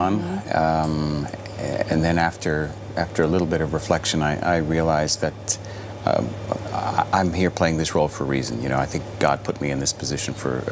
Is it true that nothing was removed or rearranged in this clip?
yes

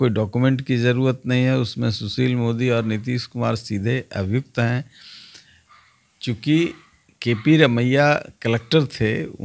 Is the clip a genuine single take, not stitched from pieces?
yes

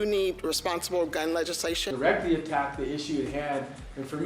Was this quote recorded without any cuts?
no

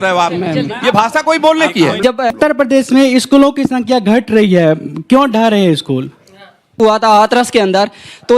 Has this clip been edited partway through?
yes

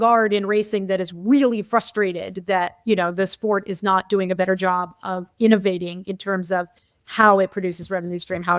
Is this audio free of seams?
yes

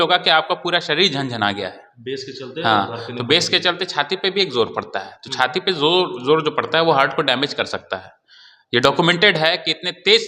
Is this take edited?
no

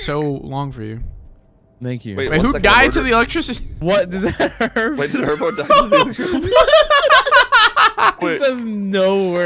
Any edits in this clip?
no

